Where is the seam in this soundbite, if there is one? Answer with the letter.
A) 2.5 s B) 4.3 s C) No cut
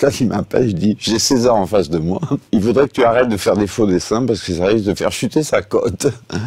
A